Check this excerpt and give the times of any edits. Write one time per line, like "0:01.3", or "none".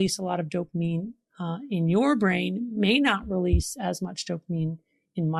none